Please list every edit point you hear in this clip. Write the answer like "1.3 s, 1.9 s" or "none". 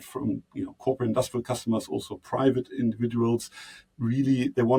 none